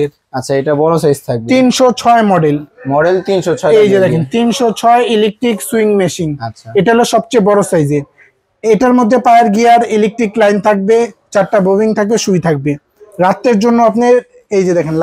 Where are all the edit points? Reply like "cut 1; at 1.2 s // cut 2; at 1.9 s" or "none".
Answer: none